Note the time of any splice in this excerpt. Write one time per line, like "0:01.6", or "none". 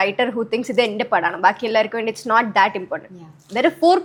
none